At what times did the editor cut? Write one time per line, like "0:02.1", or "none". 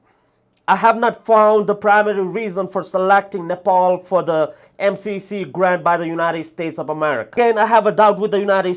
0:07.3